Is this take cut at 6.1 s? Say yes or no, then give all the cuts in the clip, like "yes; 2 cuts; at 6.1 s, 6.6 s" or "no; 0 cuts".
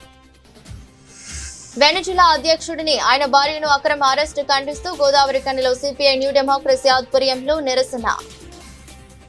no; 1 cut; at 1.4 s